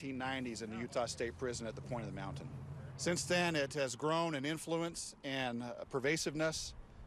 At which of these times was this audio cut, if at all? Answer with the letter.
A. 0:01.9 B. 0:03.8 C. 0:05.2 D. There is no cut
D